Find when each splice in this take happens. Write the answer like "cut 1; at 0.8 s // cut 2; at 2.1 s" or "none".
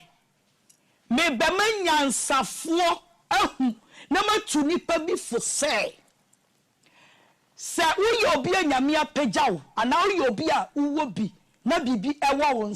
none